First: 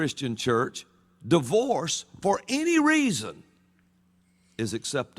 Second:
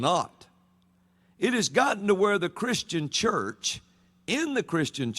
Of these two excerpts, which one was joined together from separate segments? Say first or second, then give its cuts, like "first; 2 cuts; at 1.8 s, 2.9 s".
second; 1 cut; at 2.0 s